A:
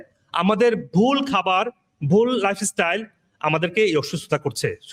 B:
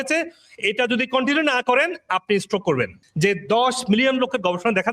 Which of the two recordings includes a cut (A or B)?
B